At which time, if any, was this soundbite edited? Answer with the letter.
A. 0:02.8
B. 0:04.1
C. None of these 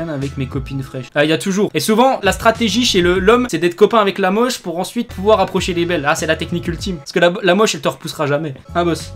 C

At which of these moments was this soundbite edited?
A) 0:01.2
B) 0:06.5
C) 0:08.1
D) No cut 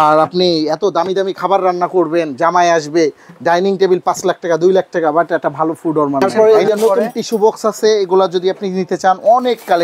B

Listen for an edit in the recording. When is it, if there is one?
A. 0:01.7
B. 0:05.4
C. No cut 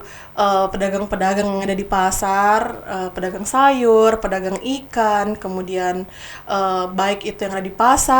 C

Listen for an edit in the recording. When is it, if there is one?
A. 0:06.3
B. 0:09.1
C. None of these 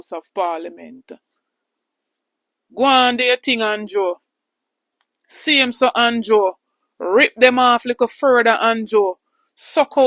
C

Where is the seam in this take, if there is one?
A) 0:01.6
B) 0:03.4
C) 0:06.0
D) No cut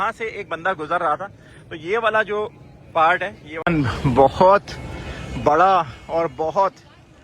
B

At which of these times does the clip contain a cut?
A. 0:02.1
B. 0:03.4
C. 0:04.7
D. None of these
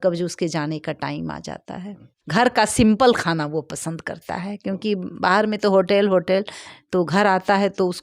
A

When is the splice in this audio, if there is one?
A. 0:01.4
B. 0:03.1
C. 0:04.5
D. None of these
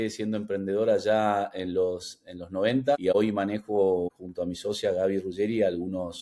B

